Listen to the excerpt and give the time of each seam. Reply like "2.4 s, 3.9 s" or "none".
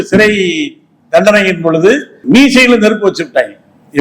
2.2 s